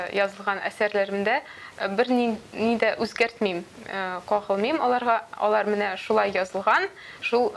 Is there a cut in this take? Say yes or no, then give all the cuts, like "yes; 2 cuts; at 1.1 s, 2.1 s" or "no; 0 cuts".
no; 0 cuts